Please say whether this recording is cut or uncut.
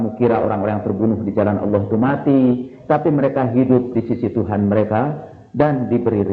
uncut